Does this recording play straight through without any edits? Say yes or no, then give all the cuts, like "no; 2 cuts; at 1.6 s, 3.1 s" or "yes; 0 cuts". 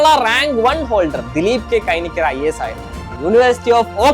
no; 1 cut; at 3.1 s